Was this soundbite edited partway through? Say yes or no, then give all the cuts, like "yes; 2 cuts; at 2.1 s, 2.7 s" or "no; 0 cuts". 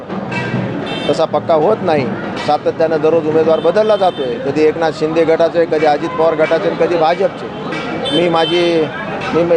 no; 0 cuts